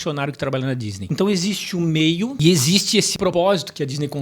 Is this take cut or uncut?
cut